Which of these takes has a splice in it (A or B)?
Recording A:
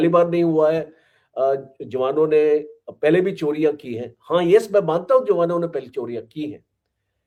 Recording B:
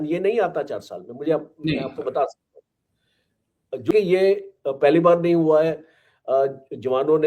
B